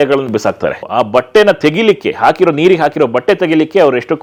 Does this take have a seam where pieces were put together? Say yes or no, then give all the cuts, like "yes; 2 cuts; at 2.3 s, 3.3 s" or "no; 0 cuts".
no; 0 cuts